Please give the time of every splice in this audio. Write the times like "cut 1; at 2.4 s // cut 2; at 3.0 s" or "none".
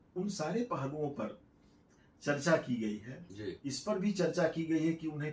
none